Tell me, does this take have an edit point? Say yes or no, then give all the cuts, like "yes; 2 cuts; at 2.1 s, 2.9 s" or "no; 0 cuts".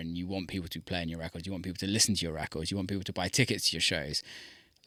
no; 0 cuts